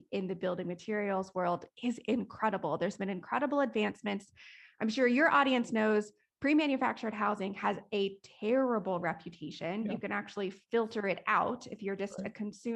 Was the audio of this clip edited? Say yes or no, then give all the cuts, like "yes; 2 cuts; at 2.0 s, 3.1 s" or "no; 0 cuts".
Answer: no; 0 cuts